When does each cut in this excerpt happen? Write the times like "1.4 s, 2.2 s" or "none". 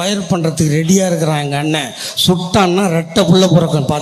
none